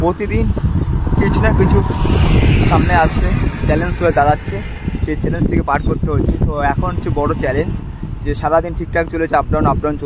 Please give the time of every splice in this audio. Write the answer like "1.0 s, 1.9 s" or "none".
none